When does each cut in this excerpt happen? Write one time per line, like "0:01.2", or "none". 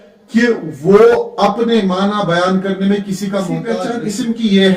0:03.8